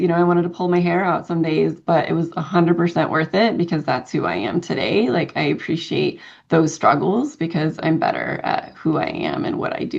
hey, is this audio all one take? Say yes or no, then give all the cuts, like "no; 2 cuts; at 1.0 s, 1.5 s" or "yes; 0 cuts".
yes; 0 cuts